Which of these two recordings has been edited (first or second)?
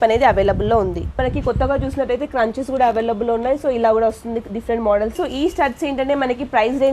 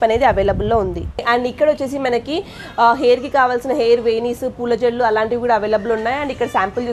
first